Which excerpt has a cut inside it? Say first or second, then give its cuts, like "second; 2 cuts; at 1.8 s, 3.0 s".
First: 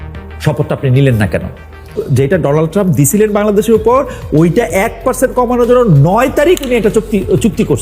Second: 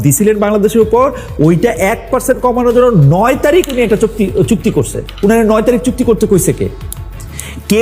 first; 1 cut; at 1.9 s